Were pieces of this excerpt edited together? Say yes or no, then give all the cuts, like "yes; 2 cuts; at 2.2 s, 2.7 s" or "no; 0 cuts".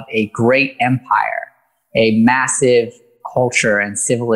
no; 0 cuts